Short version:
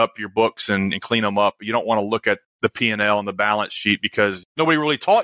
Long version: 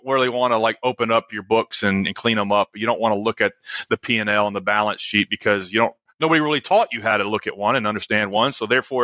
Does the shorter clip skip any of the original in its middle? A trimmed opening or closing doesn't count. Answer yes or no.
yes